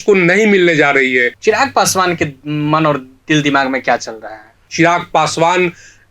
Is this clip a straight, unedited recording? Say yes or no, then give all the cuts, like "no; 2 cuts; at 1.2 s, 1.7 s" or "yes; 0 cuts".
no; 2 cuts; at 1.3 s, 4.6 s